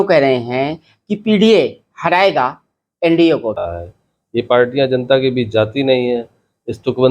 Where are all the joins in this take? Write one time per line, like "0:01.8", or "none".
0:03.6